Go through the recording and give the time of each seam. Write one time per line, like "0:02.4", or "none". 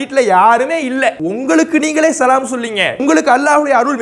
0:01.2
0:02.9